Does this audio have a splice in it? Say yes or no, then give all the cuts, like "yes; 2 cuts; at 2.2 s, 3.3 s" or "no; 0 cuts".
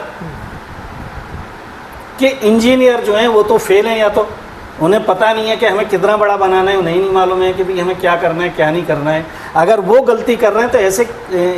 no; 0 cuts